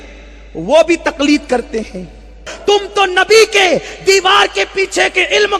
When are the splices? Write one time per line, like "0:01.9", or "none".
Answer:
0:02.5